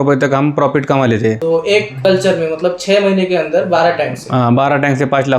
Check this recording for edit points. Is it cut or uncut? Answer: cut